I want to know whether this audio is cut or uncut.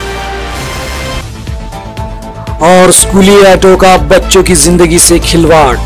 cut